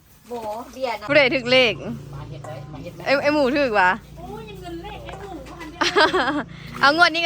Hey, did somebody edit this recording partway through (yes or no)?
yes